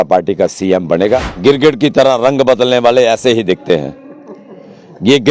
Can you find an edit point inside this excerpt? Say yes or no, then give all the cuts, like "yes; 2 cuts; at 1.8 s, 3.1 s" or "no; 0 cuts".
yes; 1 cut; at 1.3 s